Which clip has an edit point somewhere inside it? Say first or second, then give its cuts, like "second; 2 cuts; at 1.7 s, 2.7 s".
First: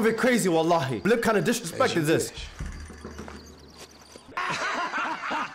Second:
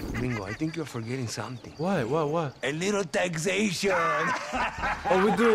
first; 2 cuts; at 1.0 s, 4.3 s